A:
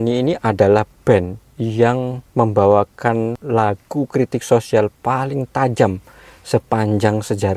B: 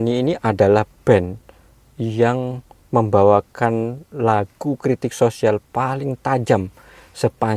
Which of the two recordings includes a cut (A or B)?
A